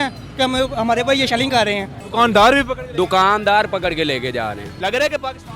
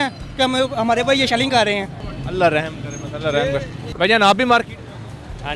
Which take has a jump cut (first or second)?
first